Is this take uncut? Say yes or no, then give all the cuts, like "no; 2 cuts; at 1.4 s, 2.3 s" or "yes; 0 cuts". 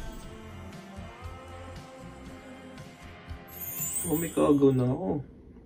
no; 1 cut; at 3.9 s